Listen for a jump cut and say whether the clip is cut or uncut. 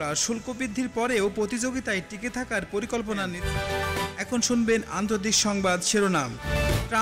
cut